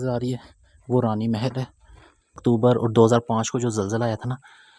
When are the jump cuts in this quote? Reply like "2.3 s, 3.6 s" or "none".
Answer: 2.3 s